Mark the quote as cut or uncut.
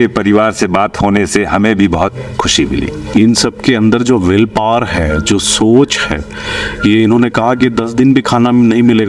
cut